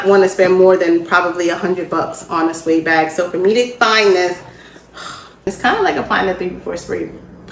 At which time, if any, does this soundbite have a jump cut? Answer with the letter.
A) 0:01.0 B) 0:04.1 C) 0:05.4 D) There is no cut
C